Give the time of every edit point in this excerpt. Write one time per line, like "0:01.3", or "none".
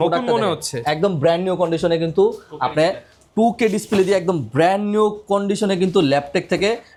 none

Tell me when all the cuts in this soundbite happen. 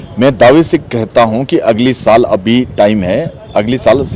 none

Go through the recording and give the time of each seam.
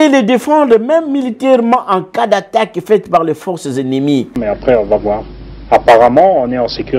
0:04.4

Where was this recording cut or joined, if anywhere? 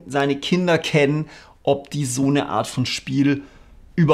none

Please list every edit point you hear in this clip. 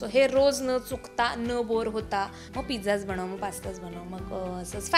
0:02.4

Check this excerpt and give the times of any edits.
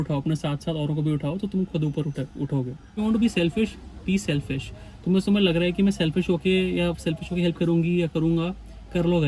0:03.0

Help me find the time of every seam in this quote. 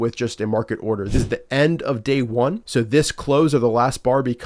0:01.0
0:02.6

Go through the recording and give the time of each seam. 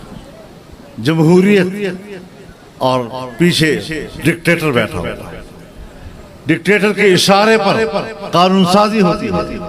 none

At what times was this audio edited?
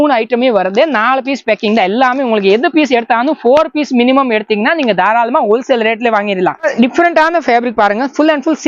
0:06.7

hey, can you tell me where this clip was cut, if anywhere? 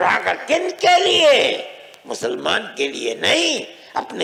none

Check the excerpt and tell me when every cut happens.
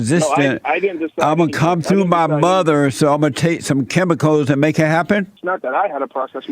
0:05.4

